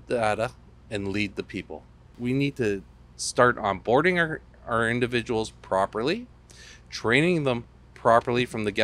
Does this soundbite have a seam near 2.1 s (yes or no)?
yes